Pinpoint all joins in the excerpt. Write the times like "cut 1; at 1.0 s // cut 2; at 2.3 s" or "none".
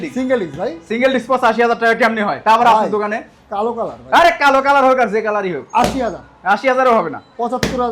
none